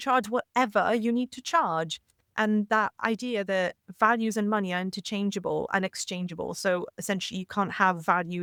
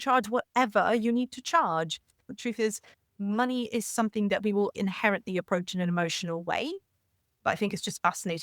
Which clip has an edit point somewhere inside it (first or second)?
second